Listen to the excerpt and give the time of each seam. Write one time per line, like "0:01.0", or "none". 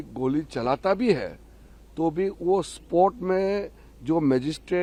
none